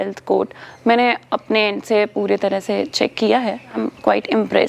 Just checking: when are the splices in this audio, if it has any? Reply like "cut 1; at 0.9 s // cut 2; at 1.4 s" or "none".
cut 1; at 3.8 s